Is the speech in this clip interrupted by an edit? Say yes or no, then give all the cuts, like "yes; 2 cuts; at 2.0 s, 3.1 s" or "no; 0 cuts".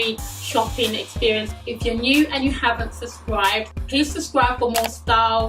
yes; 2 cuts; at 1.5 s, 3.7 s